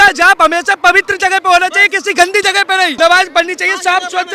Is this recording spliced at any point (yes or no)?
yes